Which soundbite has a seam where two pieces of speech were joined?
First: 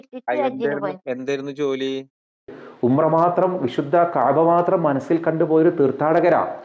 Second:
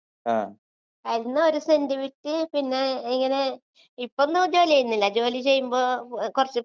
first; 1 cut; at 2.6 s

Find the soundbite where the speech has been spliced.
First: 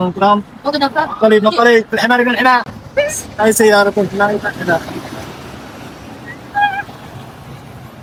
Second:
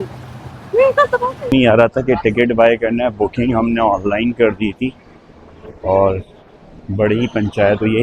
second; 1 cut; at 1.5 s

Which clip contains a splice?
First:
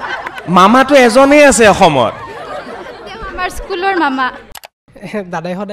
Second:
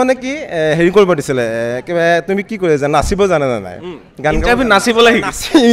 first; 1 cut; at 4.6 s

